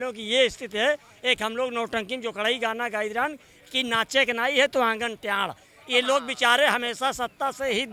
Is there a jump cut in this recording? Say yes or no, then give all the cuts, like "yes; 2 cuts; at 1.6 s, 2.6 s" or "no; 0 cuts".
no; 0 cuts